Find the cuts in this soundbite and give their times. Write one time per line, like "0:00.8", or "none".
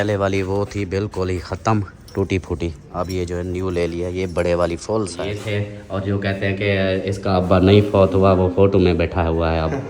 0:05.3